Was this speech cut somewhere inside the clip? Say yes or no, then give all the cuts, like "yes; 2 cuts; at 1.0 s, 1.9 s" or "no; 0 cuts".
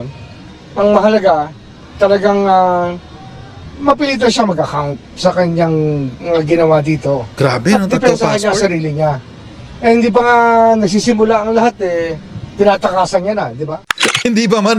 no; 0 cuts